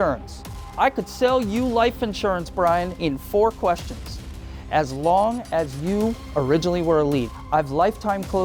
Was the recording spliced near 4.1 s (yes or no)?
no